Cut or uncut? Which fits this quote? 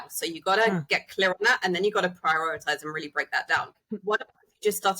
cut